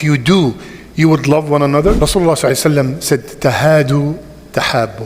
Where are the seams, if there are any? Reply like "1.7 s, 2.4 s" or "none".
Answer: 2.1 s